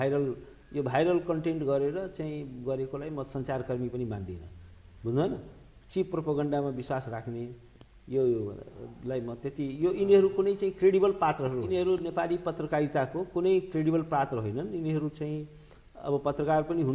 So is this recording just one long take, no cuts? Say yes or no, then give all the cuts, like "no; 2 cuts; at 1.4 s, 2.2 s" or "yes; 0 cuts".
no; 1 cut; at 11.7 s